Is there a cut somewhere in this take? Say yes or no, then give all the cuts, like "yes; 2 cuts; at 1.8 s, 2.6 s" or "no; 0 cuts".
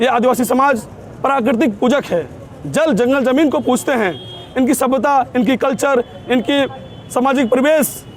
no; 0 cuts